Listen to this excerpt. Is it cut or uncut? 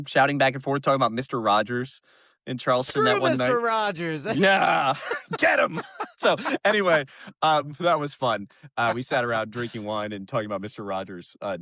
uncut